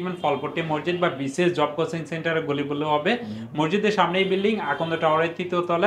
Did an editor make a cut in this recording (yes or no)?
no